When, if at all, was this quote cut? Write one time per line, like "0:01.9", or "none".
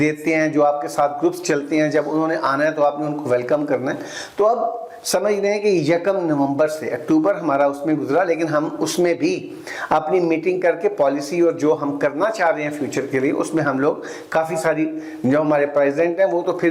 none